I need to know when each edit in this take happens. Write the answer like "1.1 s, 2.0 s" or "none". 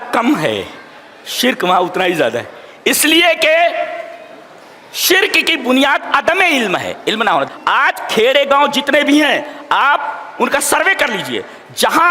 7.5 s